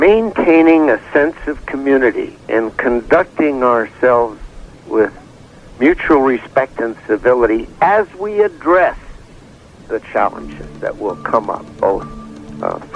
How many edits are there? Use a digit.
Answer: 0